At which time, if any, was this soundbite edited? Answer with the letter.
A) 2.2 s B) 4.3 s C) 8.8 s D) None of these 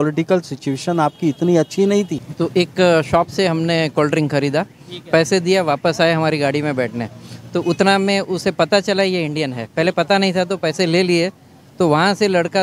A